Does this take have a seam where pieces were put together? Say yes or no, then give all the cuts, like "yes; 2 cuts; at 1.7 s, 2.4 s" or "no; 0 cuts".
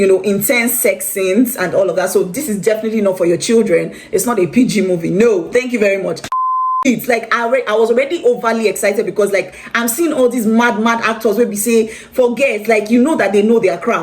yes; 1 cut; at 6.6 s